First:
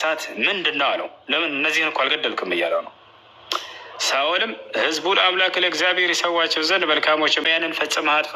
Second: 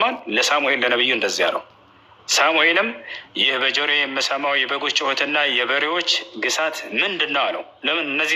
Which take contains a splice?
first; 1 cut; at 7.4 s

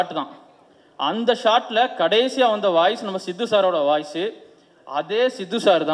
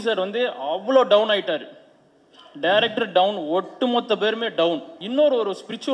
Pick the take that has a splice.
second; 1 cut; at 5.0 s

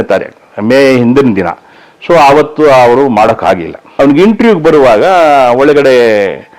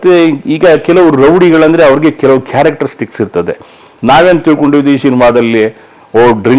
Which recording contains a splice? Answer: first; 1 cut; at 4.0 s

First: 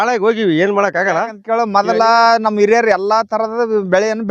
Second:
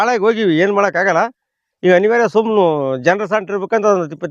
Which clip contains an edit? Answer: first; 1 cut; at 1.4 s

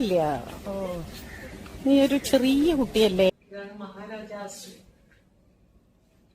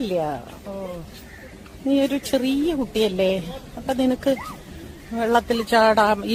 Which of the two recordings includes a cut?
first; 1 cut; at 3.3 s

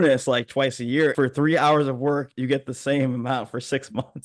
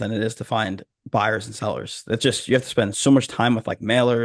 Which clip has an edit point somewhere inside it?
first; 1 cut; at 1.1 s

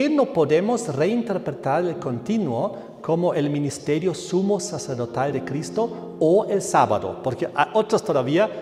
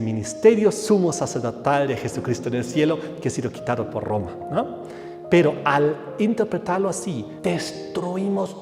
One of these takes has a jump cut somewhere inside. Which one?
second; 1 cut; at 7.3 s

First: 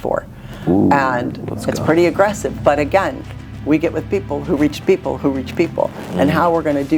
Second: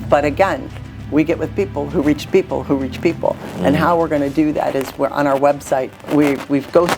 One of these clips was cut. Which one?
second; 1 cut; at 6.0 s

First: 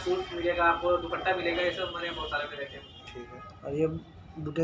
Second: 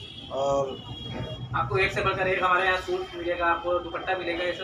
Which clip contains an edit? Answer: first; 1 cut; at 3.0 s

